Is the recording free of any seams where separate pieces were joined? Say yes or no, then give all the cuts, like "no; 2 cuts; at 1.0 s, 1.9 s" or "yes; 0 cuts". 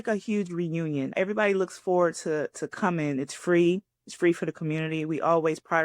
no; 1 cut; at 1.1 s